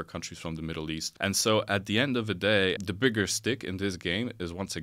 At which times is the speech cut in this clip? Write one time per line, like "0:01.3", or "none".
0:01.1
0:02.8